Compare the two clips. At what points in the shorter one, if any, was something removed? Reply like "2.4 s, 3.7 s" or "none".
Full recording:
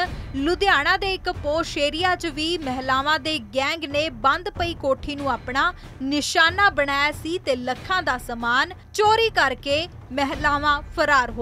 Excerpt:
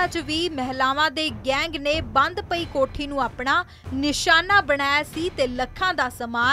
none

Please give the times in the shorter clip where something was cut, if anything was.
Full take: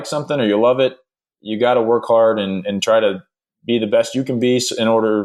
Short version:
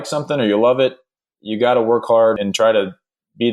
2.4 s

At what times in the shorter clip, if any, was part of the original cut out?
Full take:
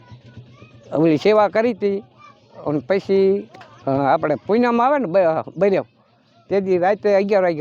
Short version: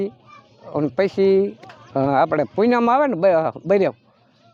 none

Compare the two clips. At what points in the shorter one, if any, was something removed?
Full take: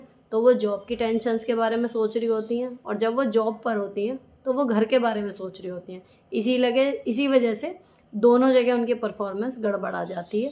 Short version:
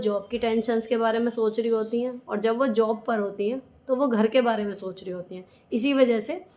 5.7 s

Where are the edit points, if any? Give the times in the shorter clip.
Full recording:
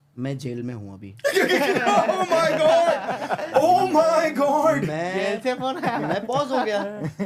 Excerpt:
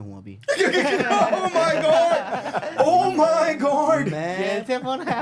none

